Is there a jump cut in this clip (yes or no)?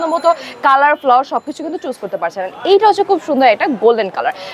no